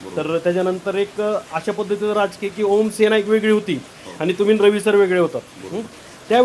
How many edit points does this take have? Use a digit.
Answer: 0